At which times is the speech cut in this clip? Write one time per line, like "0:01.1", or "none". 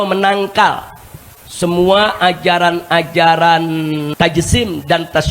0:04.1